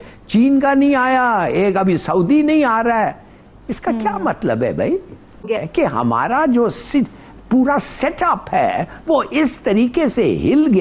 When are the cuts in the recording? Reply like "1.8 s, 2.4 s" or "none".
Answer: 5.6 s